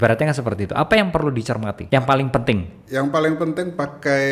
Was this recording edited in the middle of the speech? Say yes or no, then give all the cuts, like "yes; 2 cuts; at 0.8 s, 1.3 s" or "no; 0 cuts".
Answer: yes; 1 cut; at 1.8 s